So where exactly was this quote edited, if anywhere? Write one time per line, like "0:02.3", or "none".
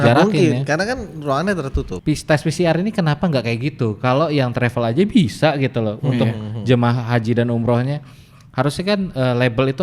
0:01.9